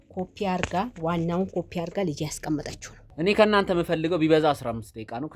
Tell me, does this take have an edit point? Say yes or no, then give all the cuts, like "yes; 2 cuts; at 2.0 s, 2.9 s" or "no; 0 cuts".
yes; 1 cut; at 3.1 s